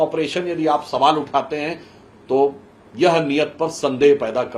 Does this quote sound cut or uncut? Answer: uncut